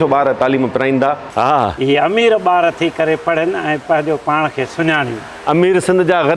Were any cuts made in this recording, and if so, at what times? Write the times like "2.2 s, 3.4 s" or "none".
1.2 s